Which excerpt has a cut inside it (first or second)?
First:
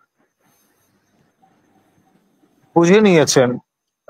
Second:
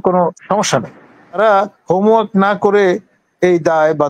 second